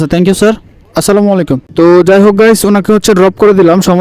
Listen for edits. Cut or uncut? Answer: cut